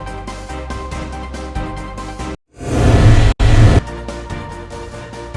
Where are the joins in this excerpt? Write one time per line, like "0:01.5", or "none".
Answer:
0:01.2